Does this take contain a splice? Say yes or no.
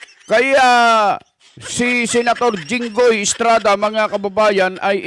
no